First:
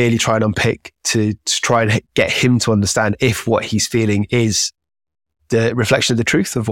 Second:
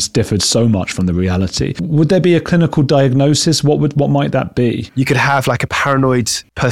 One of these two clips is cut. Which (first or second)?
second